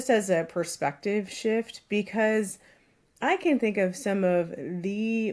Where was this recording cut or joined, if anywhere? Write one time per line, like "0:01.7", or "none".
none